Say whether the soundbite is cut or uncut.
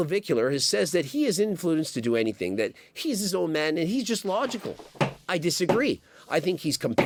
uncut